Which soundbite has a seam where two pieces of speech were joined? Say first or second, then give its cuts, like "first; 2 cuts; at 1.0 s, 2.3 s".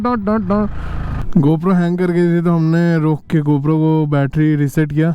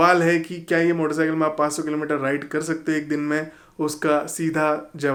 first; 1 cut; at 1.2 s